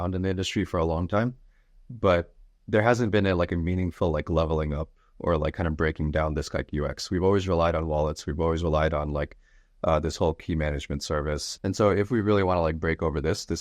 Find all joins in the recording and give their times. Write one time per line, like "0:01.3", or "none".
0:11.5

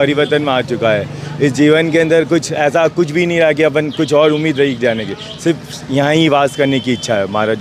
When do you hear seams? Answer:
none

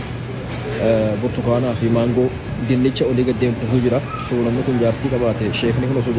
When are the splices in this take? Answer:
0:04.3

